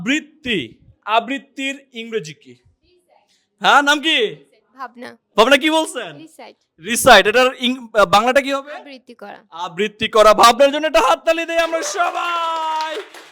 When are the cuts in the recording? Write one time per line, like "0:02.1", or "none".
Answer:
0:05.2